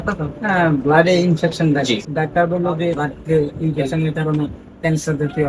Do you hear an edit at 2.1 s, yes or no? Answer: yes